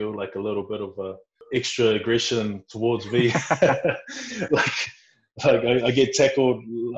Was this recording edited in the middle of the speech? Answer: yes; 1 cut; at 1.4 s

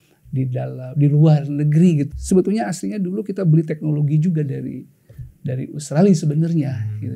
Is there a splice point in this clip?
yes; 1 cut; at 2.1 s

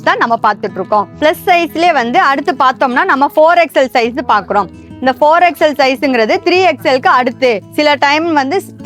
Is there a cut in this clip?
yes; 1 cut; at 1.1 s

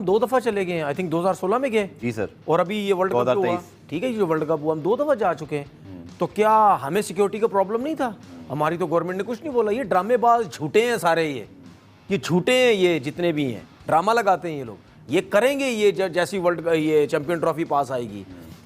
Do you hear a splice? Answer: no; 0 cuts

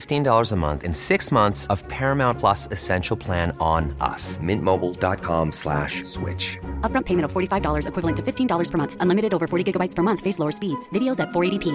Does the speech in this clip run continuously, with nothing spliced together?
yes; 0 cuts

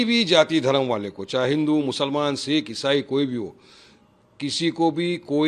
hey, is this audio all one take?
yes; 0 cuts

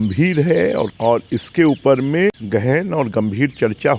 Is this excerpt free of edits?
no; 2 cuts; at 1.0 s, 2.4 s

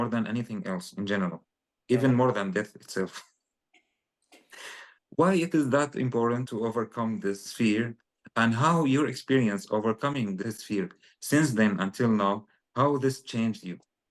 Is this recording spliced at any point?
no; 0 cuts

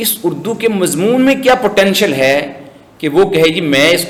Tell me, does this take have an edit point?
no; 0 cuts

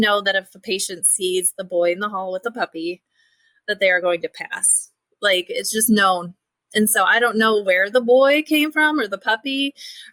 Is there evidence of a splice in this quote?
no; 0 cuts

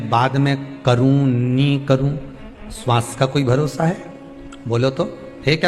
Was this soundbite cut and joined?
no; 0 cuts

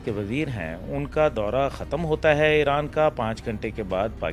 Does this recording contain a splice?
no; 0 cuts

